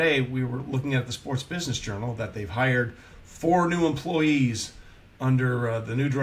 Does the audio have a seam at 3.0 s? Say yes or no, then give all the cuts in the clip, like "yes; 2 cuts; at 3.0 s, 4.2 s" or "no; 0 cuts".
no; 0 cuts